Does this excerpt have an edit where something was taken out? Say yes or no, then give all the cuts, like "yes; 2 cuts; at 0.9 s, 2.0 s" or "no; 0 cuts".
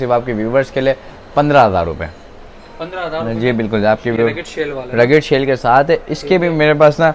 no; 0 cuts